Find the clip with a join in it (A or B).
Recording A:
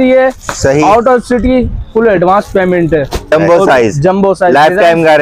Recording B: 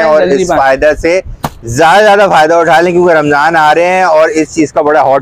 A